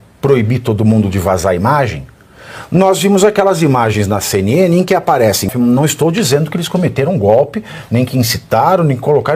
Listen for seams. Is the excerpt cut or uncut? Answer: cut